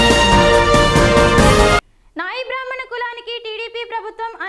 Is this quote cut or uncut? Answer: uncut